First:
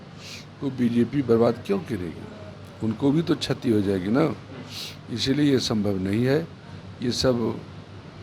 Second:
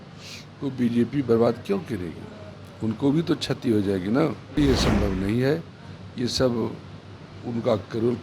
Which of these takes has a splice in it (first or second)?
second